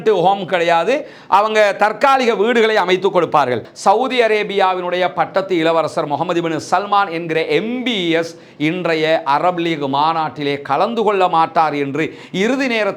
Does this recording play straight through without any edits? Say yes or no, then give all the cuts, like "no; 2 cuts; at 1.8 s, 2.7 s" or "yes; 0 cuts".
no; 1 cut; at 3.7 s